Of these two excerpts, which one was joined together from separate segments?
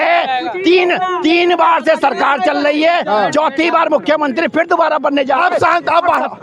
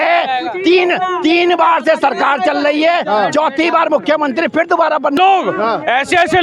second; 1 cut; at 5.2 s

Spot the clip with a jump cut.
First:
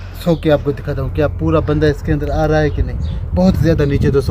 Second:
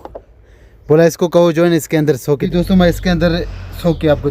second; 1 cut; at 2.4 s

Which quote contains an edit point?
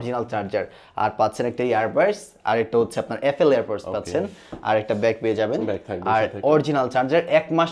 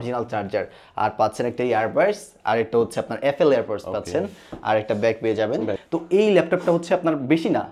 second; 1 cut; at 5.8 s

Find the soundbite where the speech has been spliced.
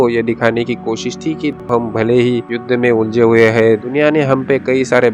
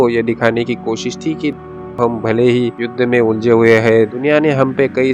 first; 1 cut; at 1.6 s

